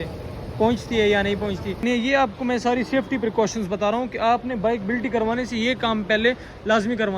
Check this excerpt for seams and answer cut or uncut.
cut